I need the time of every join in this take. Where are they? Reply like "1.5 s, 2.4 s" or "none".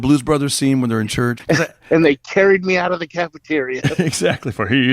1.4 s